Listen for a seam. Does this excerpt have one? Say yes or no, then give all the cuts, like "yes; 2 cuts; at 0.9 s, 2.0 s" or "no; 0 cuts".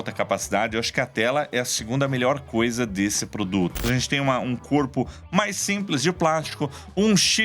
yes; 1 cut; at 3.8 s